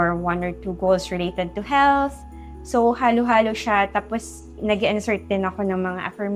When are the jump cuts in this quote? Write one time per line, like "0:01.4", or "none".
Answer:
none

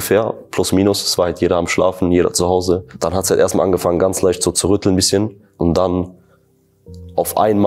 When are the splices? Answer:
0:02.9
0:05.5

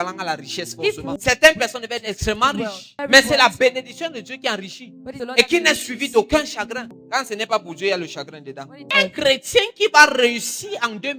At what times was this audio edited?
0:01.2
0:03.0
0:05.2
0:06.9
0:08.9

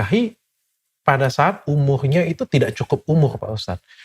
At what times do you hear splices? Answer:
none

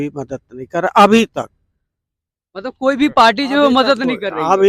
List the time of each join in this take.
none

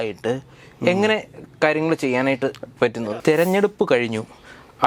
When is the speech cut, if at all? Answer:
0:03.0

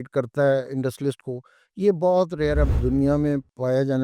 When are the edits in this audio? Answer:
0:02.7

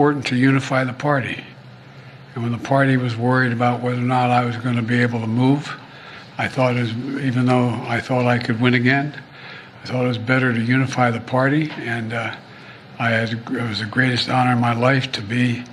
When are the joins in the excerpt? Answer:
none

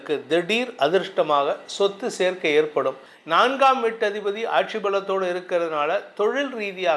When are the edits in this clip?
0:03.1

